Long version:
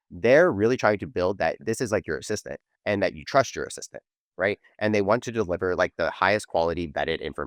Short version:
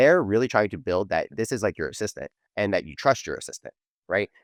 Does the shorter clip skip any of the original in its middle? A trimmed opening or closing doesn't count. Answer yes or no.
no